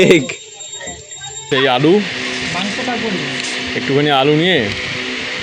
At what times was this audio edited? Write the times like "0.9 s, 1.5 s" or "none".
1.5 s